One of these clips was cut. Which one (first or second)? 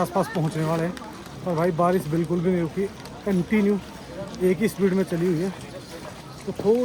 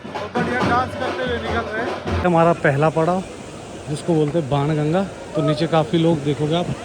second